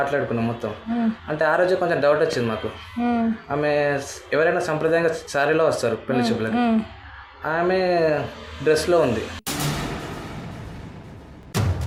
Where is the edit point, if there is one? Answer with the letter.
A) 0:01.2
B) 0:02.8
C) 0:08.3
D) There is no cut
D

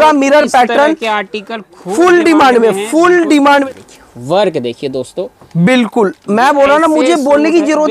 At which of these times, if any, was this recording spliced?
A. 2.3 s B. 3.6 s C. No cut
B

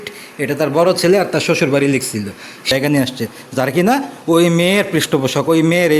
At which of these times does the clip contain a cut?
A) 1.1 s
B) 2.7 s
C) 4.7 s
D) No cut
B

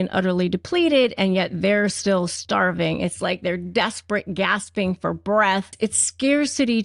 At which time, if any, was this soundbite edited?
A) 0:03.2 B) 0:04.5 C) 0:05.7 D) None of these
C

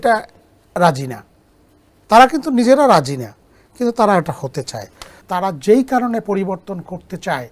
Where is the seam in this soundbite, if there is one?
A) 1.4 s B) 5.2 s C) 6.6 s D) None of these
B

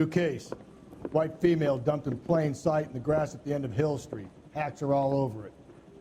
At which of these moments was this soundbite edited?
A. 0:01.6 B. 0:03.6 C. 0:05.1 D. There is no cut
A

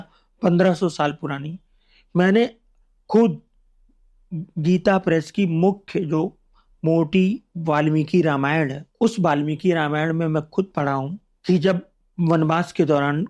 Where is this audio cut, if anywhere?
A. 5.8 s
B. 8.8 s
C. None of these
B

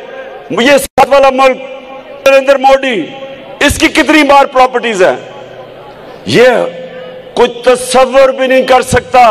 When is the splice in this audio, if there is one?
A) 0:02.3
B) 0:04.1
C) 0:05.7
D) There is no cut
A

